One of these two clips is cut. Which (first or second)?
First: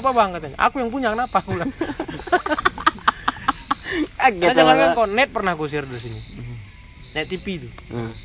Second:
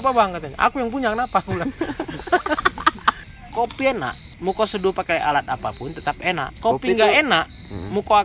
second